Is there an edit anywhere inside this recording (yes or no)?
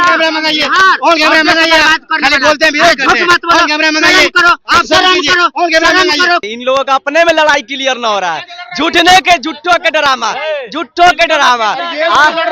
yes